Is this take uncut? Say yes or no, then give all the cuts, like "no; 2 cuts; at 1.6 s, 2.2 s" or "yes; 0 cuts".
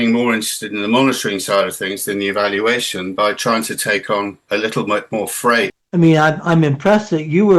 no; 1 cut; at 5.8 s